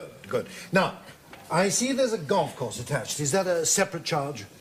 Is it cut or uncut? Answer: uncut